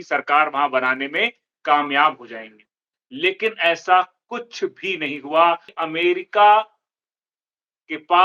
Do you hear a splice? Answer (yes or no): yes